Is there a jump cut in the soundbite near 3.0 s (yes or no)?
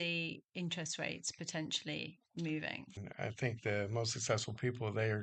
yes